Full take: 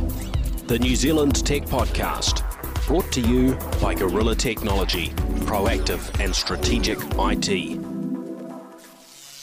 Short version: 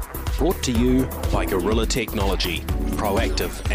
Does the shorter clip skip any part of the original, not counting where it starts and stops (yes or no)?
no